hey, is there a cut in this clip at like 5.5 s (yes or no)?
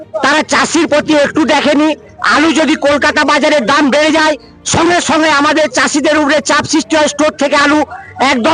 no